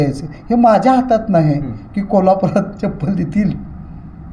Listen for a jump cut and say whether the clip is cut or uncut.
uncut